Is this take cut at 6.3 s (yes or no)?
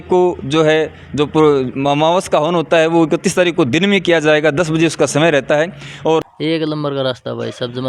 yes